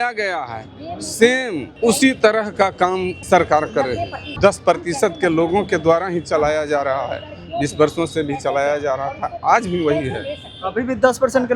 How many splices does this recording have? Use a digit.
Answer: 3